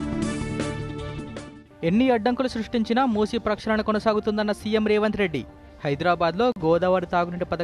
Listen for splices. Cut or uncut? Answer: uncut